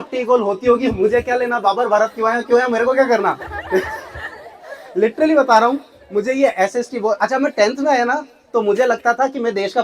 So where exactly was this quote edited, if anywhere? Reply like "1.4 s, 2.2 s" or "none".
none